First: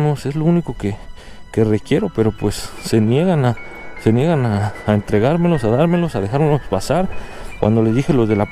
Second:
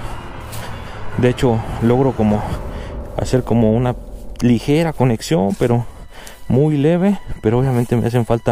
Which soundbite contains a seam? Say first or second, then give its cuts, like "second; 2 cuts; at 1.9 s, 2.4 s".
first; 1 cut; at 7.2 s